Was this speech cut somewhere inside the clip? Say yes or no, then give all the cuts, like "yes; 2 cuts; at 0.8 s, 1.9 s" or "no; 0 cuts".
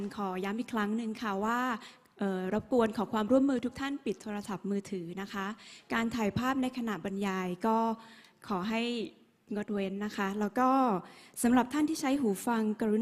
no; 0 cuts